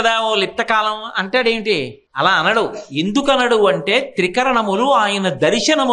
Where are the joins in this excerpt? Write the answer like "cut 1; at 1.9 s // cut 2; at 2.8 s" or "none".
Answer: cut 1; at 2.0 s